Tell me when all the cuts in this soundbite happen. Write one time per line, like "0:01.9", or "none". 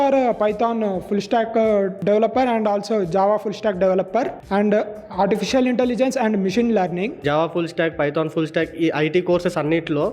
0:02.0
0:04.4
0:07.1